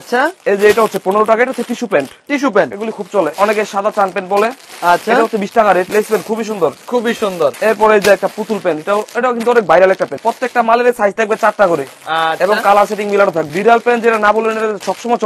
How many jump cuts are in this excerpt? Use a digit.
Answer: 5